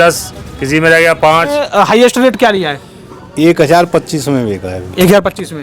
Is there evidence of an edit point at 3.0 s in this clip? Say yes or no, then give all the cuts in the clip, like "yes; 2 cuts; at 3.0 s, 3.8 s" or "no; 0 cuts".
no; 1 cut; at 1.6 s